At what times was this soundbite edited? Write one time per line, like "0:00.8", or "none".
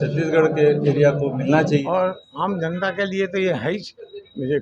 0:01.8